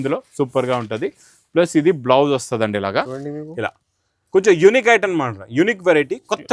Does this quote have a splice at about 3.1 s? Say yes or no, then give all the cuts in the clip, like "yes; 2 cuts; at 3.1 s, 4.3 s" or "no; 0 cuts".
yes; 1 cut; at 3.1 s